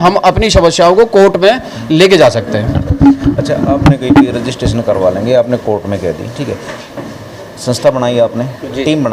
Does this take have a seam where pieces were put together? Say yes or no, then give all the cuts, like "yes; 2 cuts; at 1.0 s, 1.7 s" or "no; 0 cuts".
no; 0 cuts